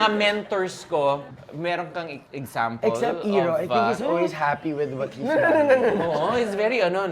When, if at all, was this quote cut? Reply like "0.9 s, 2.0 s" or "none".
1.2 s

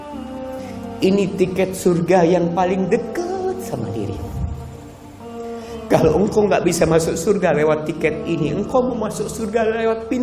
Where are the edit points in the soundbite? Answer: 1.0 s

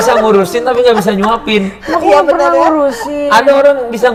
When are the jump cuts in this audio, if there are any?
none

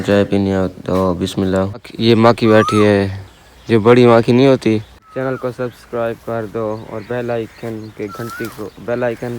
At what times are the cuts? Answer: 1.9 s, 5.0 s

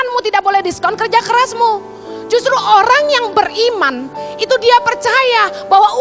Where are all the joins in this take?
none

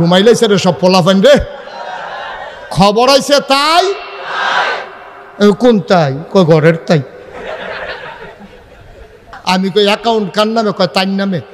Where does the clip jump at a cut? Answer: 9.3 s

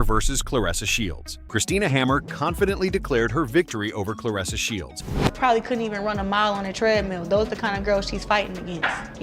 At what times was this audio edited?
1.3 s, 5.3 s

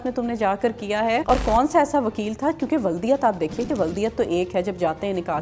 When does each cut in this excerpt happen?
1.2 s

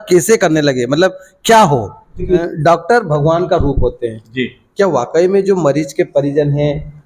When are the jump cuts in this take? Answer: 2.5 s

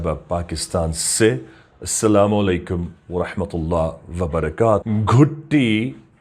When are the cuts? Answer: 4.8 s

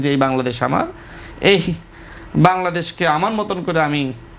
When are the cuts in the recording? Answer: none

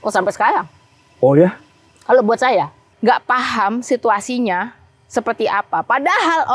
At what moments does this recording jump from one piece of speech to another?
2.8 s

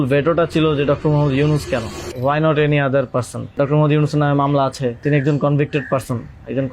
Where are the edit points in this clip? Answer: 2.0 s, 3.5 s, 5.0 s

